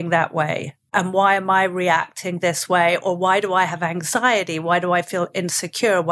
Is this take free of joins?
no; 1 cut; at 0.9 s

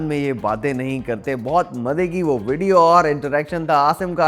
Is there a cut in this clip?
no; 0 cuts

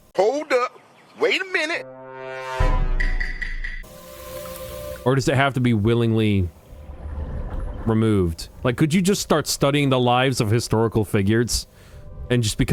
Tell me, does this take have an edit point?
no; 0 cuts

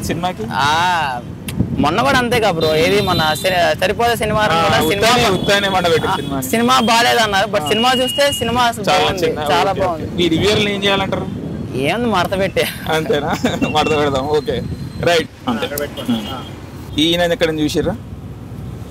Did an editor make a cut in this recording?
no; 0 cuts

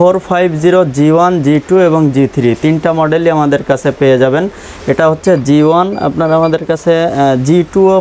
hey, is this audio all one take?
yes; 0 cuts

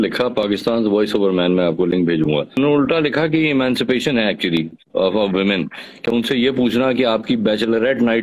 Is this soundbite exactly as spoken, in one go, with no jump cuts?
no; 1 cut; at 2.6 s

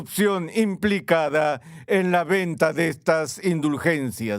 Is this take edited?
no; 0 cuts

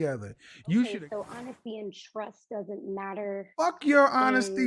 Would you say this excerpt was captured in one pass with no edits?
no; 1 cut; at 0.9 s

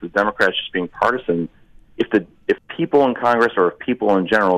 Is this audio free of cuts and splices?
no; 1 cut; at 2.7 s

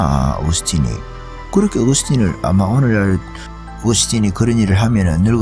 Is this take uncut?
yes; 0 cuts

